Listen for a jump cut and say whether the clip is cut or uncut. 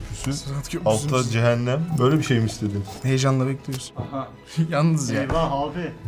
cut